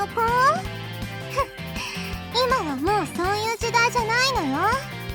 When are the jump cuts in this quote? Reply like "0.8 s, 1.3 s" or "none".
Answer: none